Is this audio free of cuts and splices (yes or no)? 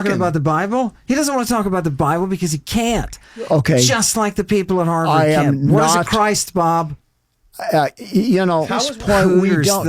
no